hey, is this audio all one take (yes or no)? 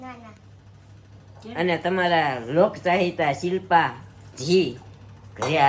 yes